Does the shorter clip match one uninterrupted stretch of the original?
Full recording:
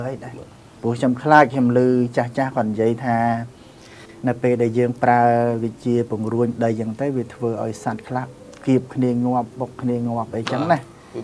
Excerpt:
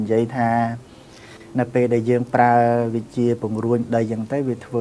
yes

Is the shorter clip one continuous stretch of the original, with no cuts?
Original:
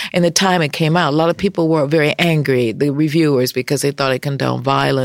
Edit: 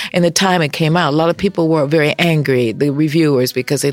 yes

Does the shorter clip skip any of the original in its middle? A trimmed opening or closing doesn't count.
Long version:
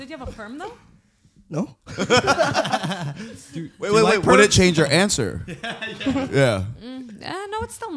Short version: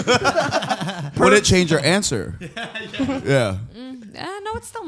yes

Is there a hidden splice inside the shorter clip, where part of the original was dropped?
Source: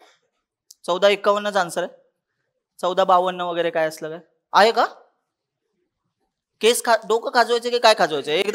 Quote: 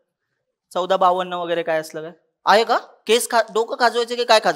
yes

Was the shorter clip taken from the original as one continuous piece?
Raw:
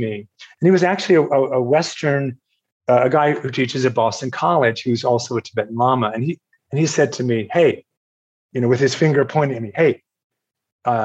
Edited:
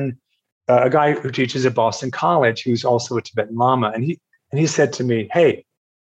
yes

